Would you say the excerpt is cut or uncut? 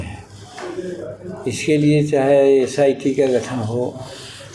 uncut